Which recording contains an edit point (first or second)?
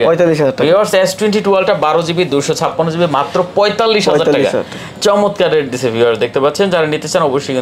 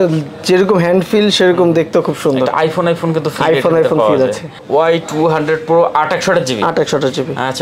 second